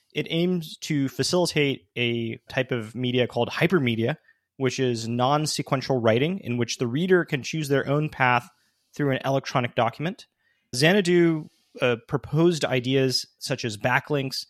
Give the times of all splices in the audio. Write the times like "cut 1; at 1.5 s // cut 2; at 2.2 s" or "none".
cut 1; at 2.5 s // cut 2; at 10.8 s // cut 3; at 13.4 s